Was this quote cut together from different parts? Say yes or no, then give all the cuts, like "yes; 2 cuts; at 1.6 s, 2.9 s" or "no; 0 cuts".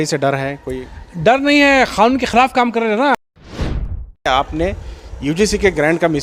yes; 1 cut; at 3.7 s